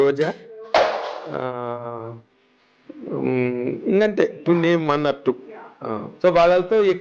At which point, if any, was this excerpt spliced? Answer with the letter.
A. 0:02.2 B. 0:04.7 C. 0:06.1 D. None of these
C